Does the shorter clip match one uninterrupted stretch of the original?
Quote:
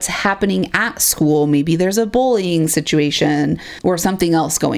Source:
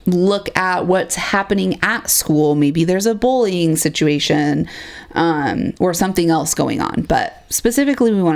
no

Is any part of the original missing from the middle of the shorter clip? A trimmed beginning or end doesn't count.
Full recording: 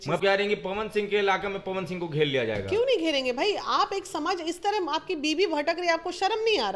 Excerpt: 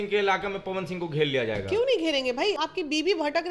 yes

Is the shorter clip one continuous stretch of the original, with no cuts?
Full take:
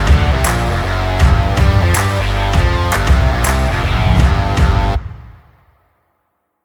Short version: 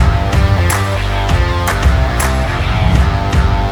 yes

